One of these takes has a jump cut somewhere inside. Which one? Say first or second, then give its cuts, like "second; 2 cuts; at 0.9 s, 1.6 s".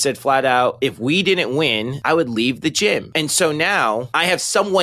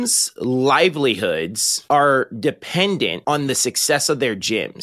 first; 2 cuts; at 1.9 s, 3.1 s